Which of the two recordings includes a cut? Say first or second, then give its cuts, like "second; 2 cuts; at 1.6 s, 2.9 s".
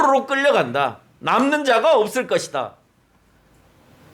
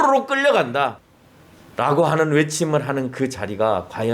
second; 1 cut; at 1.1 s